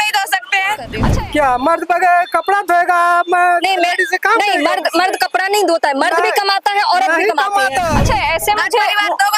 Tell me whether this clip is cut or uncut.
cut